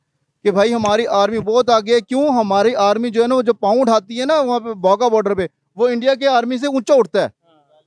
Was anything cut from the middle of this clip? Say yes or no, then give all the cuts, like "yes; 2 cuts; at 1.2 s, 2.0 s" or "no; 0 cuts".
no; 0 cuts